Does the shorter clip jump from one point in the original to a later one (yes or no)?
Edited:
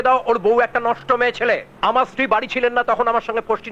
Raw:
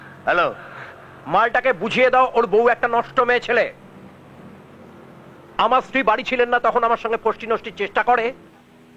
yes